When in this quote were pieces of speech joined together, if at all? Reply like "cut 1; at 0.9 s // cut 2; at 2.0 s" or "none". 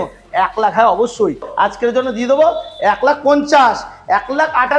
cut 1; at 1.5 s